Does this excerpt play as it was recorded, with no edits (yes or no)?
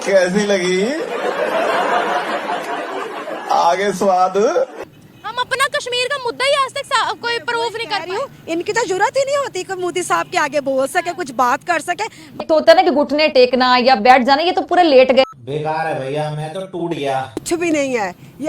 no